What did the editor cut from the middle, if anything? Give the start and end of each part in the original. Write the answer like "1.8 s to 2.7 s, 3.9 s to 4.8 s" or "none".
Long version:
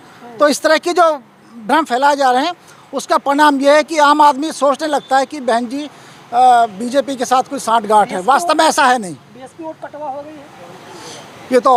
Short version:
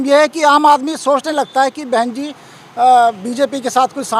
none